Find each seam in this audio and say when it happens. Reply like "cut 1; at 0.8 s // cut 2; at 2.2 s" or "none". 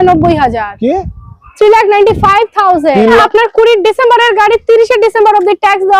cut 1; at 3.2 s